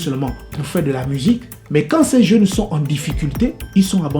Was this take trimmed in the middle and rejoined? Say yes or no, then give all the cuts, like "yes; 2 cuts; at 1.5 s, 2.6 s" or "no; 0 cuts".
yes; 1 cut; at 1.5 s